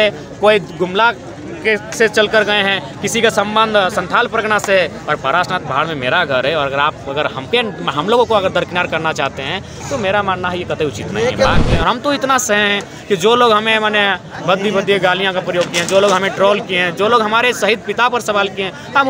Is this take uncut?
no; 1 cut; at 11.6 s

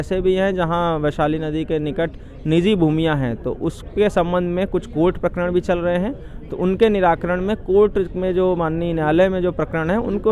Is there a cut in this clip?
no; 0 cuts

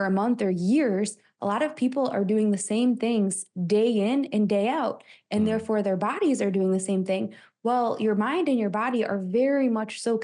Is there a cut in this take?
no; 0 cuts

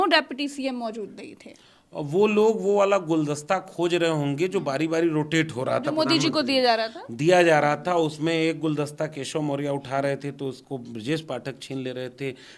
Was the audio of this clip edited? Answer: no; 0 cuts

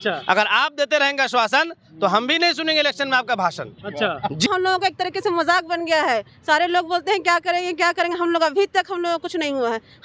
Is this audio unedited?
no; 1 cut; at 4.5 s

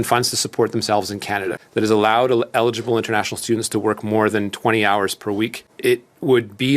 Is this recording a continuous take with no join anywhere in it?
no; 2 cuts; at 1.6 s, 5.6 s

